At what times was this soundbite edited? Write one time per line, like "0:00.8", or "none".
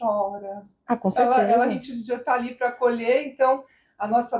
none